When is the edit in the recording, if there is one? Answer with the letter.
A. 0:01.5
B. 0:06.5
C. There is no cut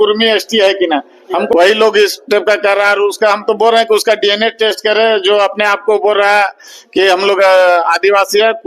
A